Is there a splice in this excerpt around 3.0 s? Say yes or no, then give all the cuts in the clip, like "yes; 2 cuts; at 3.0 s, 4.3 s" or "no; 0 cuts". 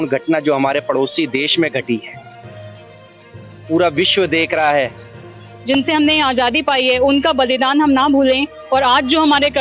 no; 1 cut; at 5.3 s